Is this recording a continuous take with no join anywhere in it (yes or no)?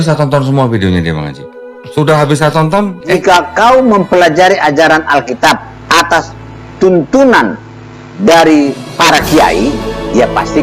no